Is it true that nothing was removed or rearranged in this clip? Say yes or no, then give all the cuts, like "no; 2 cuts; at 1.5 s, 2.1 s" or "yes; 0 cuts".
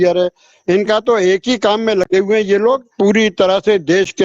no; 1 cut; at 2.9 s